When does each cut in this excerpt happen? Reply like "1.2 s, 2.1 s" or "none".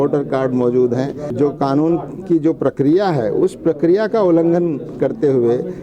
1.2 s